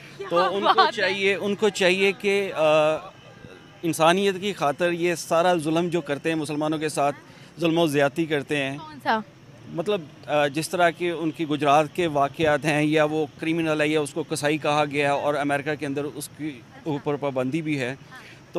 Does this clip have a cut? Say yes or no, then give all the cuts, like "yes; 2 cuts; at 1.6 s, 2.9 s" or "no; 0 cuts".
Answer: no; 0 cuts